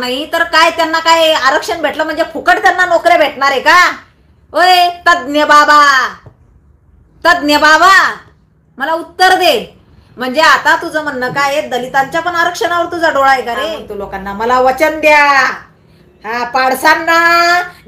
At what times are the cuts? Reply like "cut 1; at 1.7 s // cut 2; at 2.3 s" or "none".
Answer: cut 1; at 13.8 s